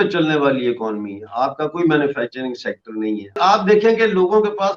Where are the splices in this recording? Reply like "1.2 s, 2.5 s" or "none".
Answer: 3.2 s